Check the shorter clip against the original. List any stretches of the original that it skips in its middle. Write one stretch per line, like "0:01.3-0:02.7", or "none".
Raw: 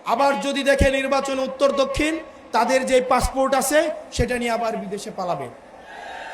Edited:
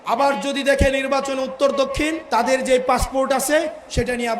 0:02.2-0:02.4